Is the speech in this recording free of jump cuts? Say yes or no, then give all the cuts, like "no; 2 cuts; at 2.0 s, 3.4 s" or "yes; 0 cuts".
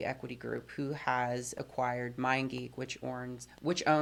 yes; 0 cuts